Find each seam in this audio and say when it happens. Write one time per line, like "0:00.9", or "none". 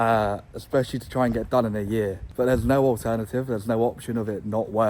0:02.2